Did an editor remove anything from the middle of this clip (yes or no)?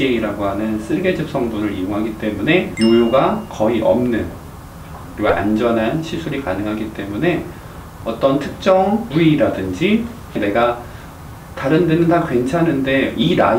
no